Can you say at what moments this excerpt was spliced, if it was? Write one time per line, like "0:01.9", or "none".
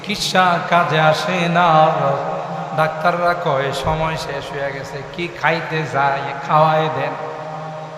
none